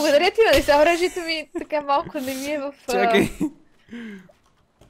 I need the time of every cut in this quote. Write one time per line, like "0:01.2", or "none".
none

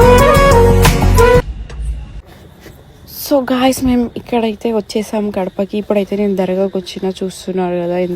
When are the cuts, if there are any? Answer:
none

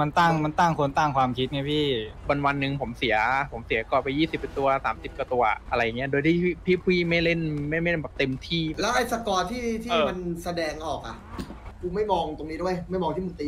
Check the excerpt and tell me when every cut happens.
0:02.2
0:05.6
0:08.8
0:11.7

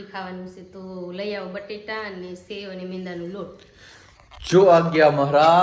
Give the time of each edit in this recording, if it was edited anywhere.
none

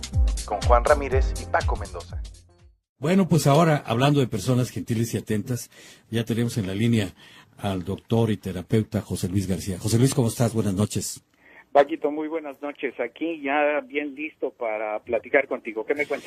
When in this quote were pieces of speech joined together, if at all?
none

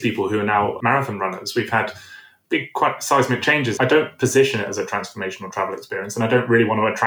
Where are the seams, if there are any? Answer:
0:00.8
0:02.4
0:03.7

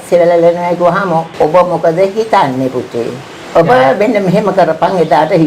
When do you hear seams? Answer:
0:01.3
0:03.3

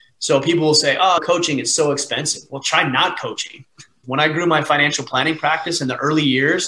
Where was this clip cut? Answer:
0:04.0

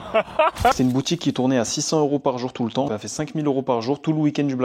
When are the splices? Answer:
0:00.7
0:02.9

